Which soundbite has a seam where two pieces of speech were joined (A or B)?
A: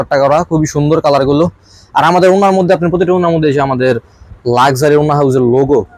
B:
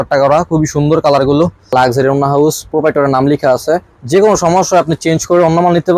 B